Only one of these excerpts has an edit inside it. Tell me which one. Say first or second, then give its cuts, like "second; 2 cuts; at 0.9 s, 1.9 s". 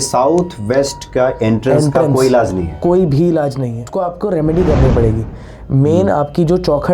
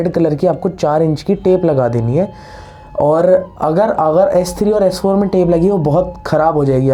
first; 1 cut; at 3.9 s